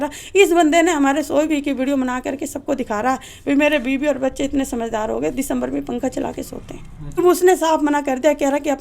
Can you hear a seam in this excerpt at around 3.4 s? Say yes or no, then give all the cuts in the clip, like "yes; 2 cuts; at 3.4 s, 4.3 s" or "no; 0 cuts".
no; 1 cut; at 7.2 s